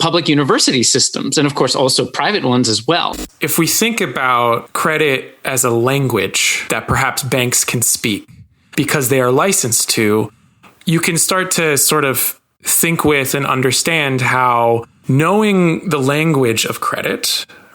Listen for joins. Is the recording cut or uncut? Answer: cut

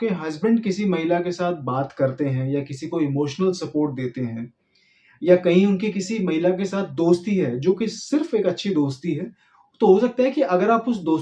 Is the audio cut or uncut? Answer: uncut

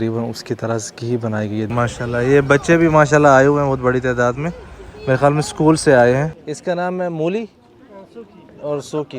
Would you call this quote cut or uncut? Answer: cut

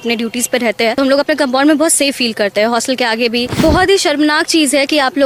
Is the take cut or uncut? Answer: cut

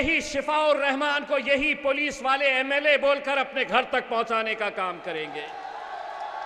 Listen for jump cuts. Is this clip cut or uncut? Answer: uncut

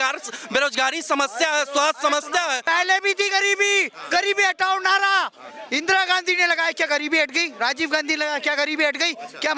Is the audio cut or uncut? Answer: cut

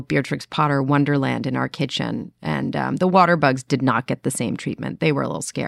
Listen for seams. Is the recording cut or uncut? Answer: uncut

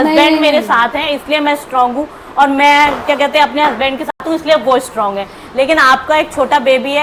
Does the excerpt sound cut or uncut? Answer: uncut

